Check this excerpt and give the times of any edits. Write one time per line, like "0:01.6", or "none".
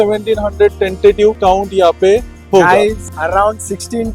0:01.4
0:03.1